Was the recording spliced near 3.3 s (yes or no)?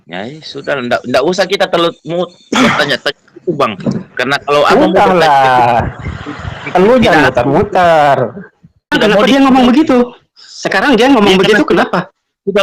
no